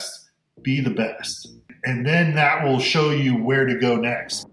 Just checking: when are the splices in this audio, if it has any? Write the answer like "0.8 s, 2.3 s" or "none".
1.8 s